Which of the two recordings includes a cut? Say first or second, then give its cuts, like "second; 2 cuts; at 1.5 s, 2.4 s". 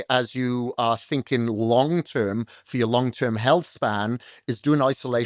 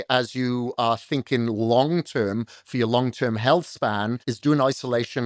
second; 1 cut; at 4.2 s